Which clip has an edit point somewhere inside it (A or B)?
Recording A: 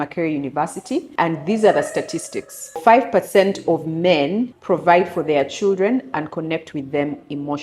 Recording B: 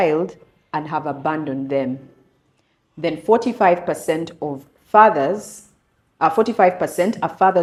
A